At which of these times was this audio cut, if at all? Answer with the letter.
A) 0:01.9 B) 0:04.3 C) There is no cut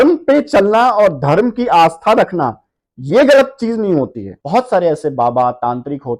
B